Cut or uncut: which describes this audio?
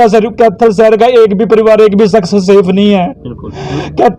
uncut